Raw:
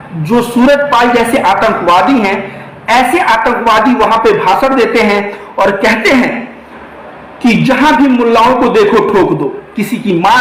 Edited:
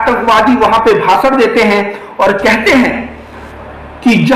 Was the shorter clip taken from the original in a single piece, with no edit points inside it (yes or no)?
yes